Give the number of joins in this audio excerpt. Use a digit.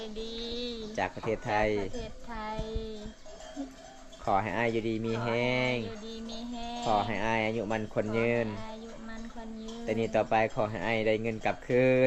0